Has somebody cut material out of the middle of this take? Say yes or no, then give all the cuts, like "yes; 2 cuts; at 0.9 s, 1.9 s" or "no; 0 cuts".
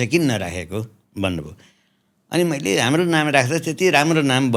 no; 0 cuts